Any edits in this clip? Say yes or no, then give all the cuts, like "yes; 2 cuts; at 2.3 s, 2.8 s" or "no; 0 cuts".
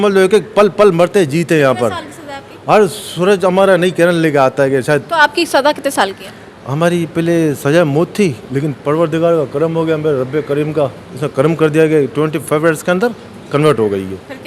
no; 0 cuts